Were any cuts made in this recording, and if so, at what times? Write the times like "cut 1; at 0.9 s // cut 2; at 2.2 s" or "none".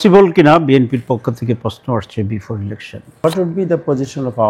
cut 1; at 3.2 s